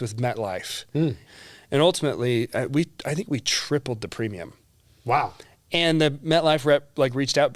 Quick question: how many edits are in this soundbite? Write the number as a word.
one